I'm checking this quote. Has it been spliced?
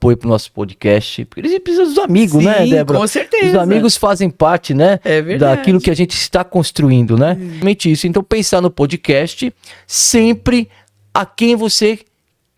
yes; 1 cut; at 7.6 s

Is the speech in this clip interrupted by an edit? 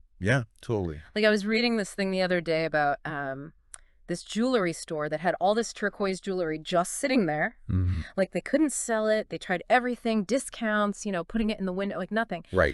no; 0 cuts

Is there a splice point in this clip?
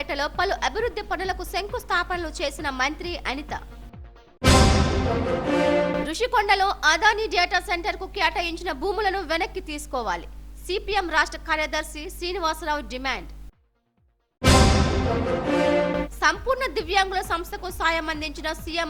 no; 0 cuts

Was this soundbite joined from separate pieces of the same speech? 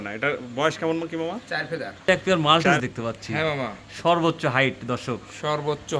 yes; 1 cut; at 1.9 s

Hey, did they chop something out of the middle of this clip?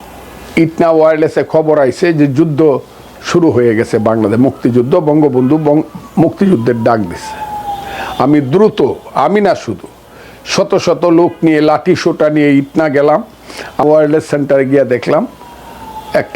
yes; 1 cut; at 13.8 s

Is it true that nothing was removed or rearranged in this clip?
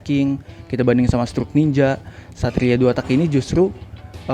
yes; 0 cuts

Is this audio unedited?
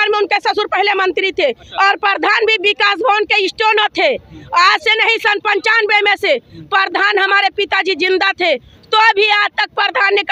yes; 0 cuts

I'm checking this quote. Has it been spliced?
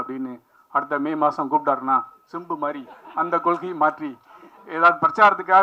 no; 0 cuts

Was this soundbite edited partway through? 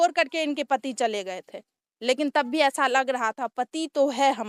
no; 0 cuts

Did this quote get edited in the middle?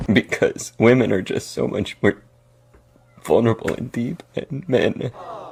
no; 0 cuts

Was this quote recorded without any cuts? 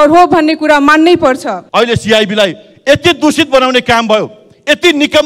no; 1 cut; at 1.6 s

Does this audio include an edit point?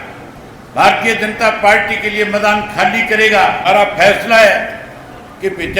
yes; 1 cut; at 3.6 s

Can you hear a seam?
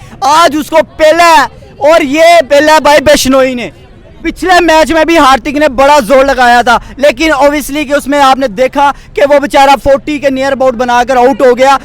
yes; 1 cut; at 4.2 s

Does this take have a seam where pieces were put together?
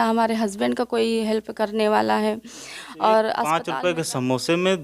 yes; 1 cut; at 3.6 s

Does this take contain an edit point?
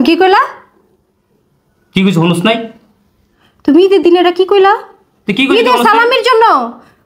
no; 0 cuts

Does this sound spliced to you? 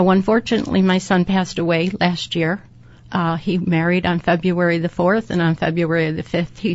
no; 0 cuts

